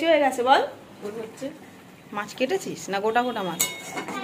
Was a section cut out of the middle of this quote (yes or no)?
yes